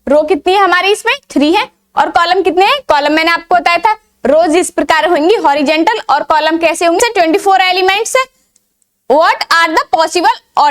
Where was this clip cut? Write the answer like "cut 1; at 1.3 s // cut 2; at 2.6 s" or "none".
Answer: cut 1; at 7.0 s